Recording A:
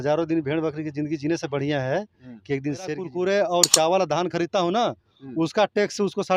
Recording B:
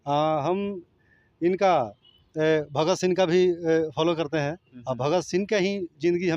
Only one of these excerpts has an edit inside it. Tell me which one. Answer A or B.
A